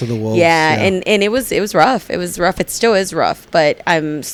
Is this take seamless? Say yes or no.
yes